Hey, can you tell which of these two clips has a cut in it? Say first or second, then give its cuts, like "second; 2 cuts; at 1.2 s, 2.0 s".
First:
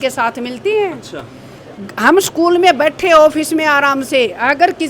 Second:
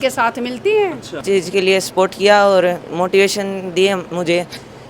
second; 1 cut; at 1.2 s